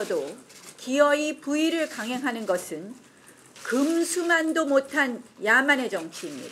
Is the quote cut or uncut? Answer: uncut